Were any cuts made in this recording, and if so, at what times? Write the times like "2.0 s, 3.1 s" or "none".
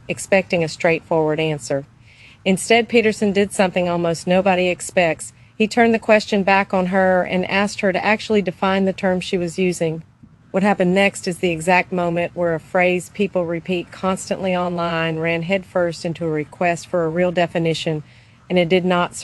none